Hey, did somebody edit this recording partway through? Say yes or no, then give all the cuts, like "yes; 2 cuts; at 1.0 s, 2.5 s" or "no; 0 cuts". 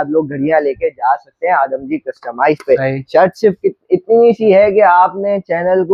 no; 0 cuts